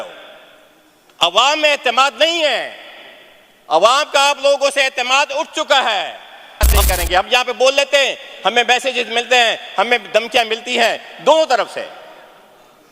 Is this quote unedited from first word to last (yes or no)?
no